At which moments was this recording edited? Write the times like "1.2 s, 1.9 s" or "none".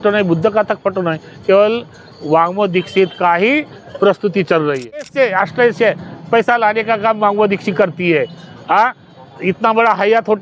5.1 s

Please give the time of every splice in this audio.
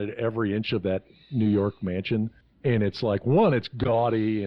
2.4 s

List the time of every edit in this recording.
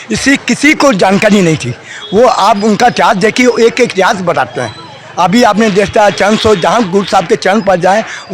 none

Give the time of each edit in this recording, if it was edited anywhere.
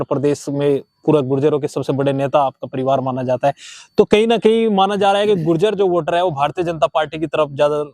none

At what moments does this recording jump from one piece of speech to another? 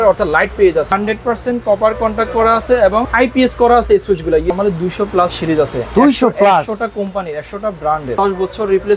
0.9 s, 3.1 s, 4.5 s, 8.1 s

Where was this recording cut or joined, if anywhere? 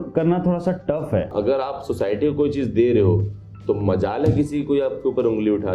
1.3 s

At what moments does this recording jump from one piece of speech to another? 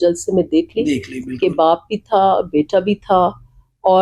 none

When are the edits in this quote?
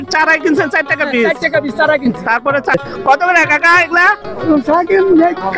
2.7 s

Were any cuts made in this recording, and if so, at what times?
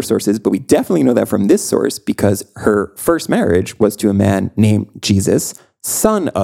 none

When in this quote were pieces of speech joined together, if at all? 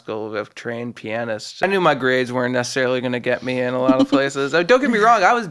1.6 s

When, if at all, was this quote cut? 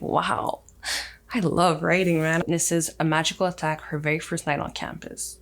2.4 s

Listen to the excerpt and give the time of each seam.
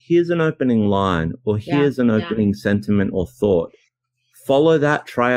none

